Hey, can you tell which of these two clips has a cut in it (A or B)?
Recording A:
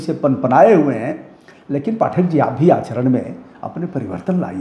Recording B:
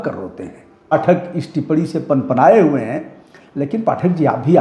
B